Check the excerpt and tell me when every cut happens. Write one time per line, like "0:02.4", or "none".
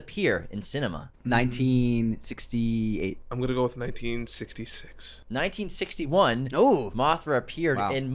0:01.1
0:03.2